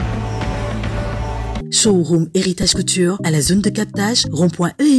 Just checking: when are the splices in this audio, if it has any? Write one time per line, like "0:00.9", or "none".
none